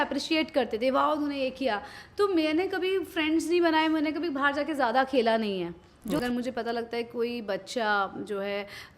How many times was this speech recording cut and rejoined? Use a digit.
1